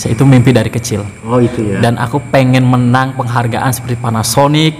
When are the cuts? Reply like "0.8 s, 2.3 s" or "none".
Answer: none